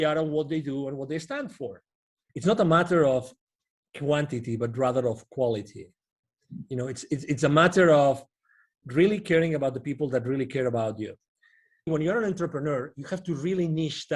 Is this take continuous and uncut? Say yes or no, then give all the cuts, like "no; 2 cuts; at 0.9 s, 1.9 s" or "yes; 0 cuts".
no; 2 cuts; at 2.2 s, 11.9 s